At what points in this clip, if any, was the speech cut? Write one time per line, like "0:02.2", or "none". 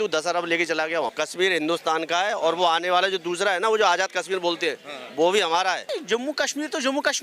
0:01.1
0:05.8